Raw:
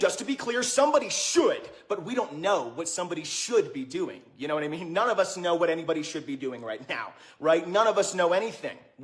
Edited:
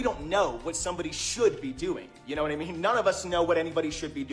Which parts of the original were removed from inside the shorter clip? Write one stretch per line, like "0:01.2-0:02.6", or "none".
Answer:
none